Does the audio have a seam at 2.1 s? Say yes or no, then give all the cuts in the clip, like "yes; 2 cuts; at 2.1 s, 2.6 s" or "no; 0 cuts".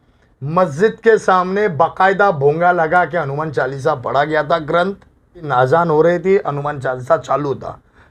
no; 1 cut; at 5.5 s